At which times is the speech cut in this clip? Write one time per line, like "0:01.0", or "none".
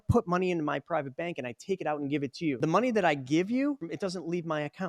0:02.6
0:03.8